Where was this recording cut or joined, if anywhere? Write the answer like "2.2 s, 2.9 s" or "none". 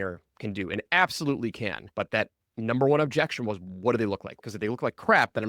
1.8 s, 4.3 s